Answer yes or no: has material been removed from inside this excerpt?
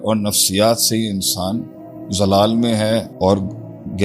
yes